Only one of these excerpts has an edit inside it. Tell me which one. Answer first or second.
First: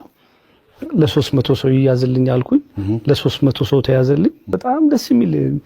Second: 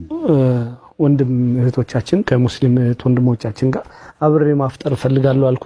first